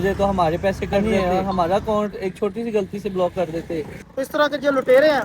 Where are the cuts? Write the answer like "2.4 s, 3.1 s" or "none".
1.0 s, 4.0 s